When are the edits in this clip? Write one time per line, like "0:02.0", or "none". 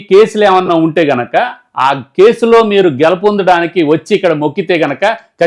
none